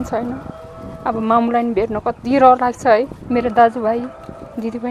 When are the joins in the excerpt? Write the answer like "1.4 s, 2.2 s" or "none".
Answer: 3.2 s